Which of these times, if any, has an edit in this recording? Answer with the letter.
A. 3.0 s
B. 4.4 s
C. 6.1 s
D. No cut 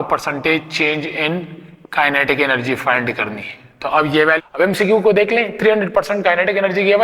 B